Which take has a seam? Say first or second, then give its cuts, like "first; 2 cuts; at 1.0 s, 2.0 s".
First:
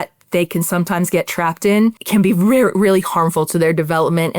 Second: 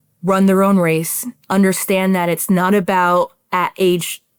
first; 1 cut; at 2.0 s